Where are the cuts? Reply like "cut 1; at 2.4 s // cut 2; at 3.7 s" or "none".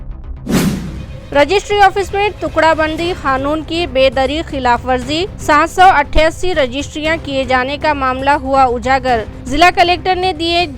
none